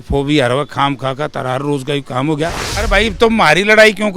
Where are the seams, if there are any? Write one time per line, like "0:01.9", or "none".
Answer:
0:02.7